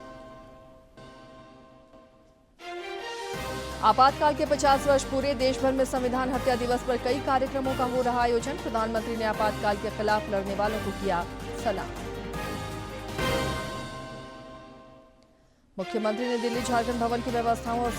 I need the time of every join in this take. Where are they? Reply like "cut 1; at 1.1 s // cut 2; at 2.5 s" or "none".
cut 1; at 1.0 s